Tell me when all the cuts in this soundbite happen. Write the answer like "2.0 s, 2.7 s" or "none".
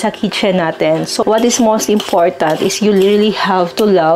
1.2 s